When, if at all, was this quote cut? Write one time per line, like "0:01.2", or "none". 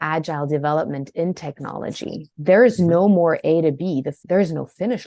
0:02.3
0:04.1